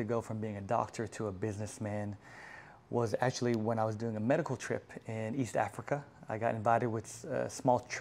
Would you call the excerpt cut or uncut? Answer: uncut